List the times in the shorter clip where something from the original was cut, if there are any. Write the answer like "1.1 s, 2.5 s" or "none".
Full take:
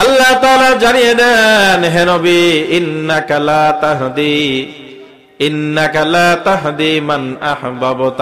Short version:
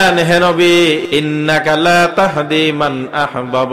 1.0 s